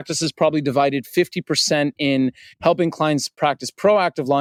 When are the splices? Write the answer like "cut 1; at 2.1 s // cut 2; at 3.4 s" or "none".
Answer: none